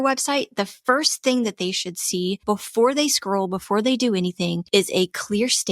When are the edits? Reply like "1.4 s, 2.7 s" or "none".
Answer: 2.4 s, 4.6 s